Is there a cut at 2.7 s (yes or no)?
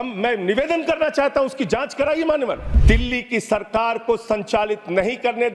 yes